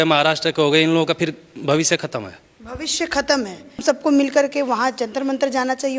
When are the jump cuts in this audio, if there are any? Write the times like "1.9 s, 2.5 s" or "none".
3.8 s